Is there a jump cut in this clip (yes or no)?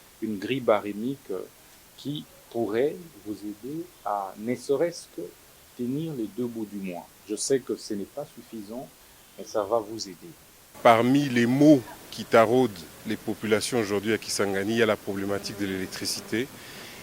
yes